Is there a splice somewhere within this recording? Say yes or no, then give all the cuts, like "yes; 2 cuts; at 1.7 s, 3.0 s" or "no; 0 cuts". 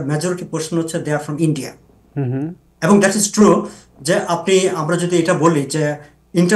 no; 0 cuts